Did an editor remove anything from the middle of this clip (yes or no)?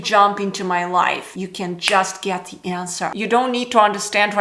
yes